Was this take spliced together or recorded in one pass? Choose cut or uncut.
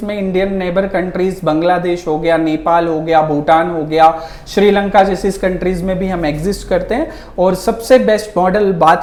uncut